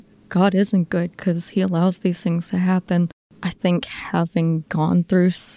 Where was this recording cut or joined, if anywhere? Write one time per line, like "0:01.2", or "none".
0:03.2

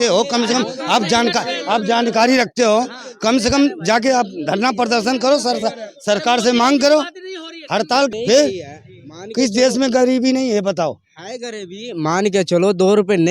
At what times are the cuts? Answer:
0:08.1

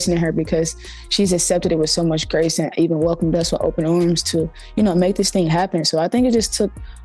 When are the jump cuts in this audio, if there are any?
none

